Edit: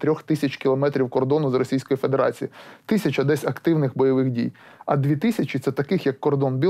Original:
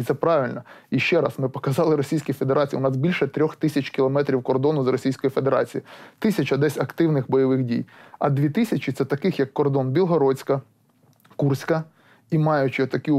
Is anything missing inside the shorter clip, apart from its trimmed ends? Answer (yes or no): no